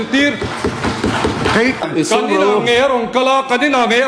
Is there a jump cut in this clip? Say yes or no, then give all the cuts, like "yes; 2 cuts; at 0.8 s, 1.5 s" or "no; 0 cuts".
yes; 1 cut; at 1.8 s